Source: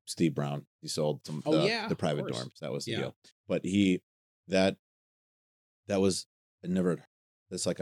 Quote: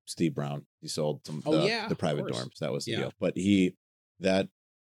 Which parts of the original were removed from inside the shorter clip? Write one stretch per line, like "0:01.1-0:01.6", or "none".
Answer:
0:03.1-0:03.4